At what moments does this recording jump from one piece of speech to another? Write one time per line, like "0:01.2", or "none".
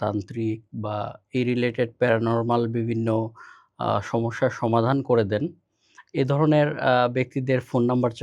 none

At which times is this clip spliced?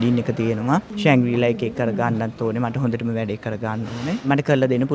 0:00.9

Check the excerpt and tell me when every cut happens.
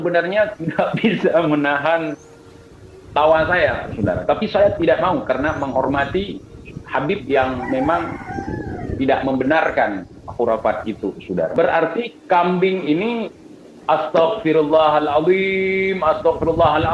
0:11.5

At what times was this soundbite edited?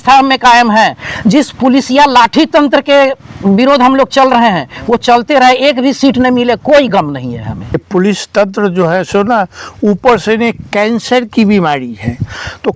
0:07.8

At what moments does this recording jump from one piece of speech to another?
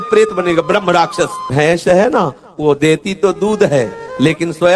0:01.5

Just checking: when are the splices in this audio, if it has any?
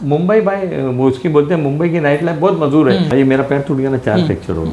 0:03.1

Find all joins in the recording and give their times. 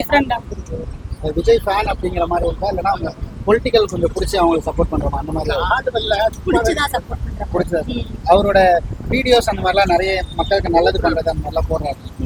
none

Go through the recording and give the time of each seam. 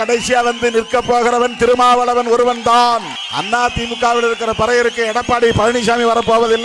0:03.2

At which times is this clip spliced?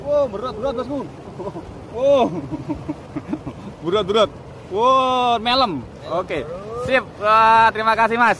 none

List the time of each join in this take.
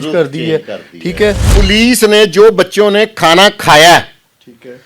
0:01.5

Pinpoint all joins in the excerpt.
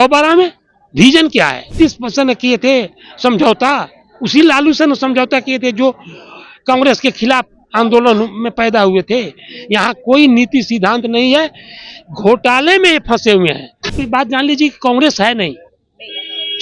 0:01.8
0:14.0

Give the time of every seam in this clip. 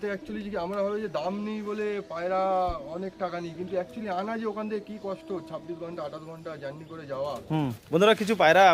0:07.8

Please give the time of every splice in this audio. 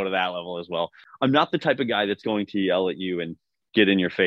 0:01.0

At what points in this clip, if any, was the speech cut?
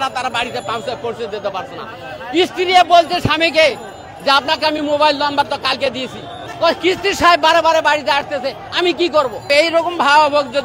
0:06.5
0:09.5

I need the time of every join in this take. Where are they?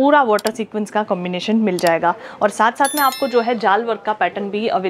none

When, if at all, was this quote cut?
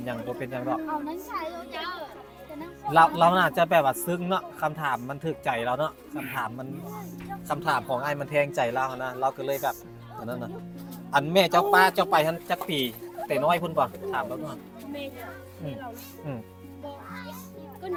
none

